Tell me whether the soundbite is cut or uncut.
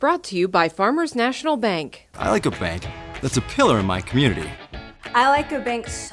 uncut